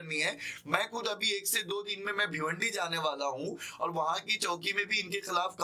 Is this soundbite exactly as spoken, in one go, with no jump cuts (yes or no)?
yes